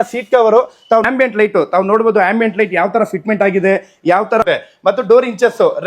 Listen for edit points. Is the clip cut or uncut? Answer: cut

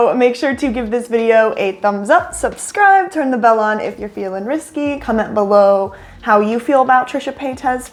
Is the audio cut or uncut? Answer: uncut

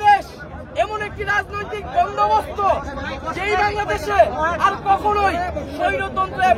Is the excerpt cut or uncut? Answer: uncut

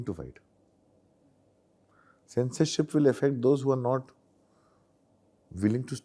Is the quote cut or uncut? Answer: uncut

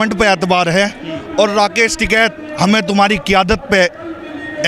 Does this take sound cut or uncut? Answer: uncut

